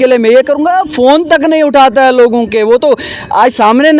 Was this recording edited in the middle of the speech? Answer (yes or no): no